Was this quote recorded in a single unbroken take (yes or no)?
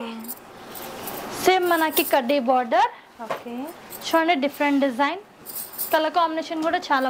yes